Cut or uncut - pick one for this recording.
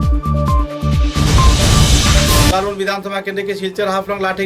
cut